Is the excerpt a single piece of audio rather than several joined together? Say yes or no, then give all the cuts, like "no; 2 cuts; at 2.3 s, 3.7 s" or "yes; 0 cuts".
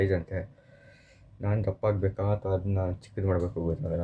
yes; 0 cuts